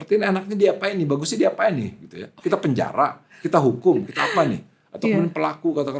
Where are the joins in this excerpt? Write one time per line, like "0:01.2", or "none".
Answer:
none